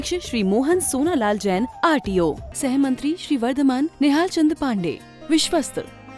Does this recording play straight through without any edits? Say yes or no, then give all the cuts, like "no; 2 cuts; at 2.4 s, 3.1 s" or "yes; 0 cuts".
yes; 0 cuts